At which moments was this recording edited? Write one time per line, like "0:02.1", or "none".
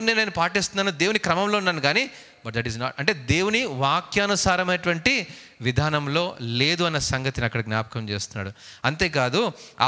none